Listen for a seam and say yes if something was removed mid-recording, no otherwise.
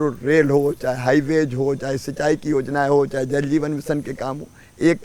no